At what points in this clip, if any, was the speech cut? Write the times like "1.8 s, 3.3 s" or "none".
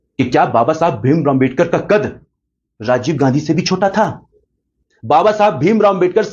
none